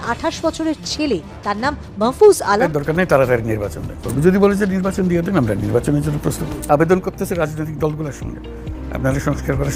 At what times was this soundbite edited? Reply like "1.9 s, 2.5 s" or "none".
2.7 s